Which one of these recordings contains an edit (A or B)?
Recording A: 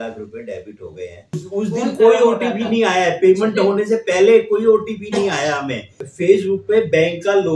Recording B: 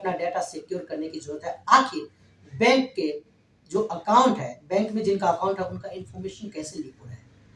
A